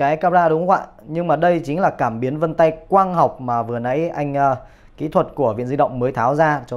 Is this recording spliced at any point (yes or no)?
no